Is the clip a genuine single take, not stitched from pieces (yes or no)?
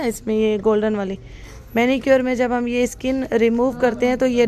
yes